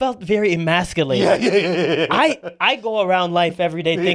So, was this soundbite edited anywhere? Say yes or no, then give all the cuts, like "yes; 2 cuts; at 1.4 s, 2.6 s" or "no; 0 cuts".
no; 0 cuts